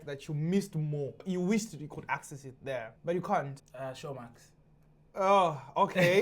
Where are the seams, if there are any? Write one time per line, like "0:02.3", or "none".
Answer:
0:01.2
0:02.9
0:03.6